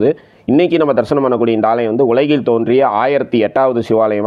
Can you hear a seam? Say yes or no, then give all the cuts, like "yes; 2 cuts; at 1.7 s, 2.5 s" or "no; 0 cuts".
no; 0 cuts